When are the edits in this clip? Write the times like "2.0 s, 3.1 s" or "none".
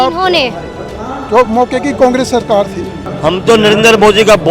3.0 s